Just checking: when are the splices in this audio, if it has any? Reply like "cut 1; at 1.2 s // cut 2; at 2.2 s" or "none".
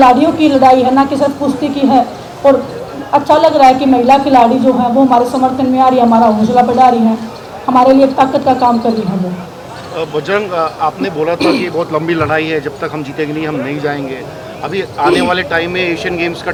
none